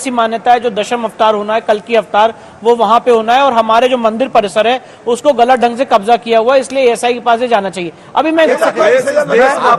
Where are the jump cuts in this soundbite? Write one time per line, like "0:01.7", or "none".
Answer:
0:08.5